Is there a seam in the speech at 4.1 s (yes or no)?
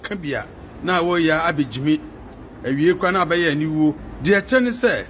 yes